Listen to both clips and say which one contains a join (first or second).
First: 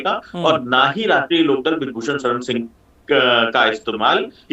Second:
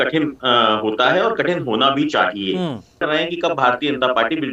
second